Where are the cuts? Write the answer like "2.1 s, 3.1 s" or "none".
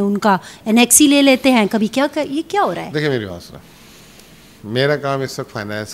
none